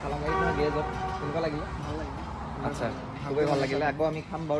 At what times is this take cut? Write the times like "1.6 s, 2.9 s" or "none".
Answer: none